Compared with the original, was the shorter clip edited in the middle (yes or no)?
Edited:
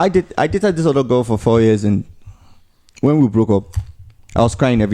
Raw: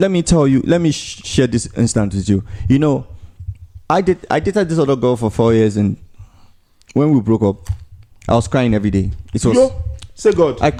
no